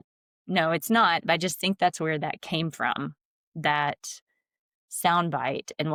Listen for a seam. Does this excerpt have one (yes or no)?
no